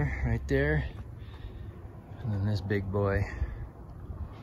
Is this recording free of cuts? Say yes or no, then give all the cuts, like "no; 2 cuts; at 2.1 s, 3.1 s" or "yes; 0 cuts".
yes; 0 cuts